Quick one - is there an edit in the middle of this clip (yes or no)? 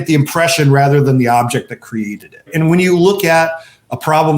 yes